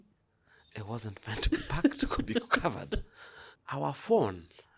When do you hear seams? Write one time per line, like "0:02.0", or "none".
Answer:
0:03.6